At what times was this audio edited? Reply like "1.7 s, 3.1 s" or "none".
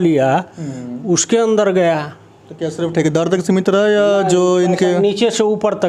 none